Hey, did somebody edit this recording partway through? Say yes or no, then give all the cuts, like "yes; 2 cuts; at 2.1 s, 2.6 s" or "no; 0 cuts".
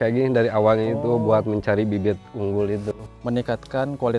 no; 0 cuts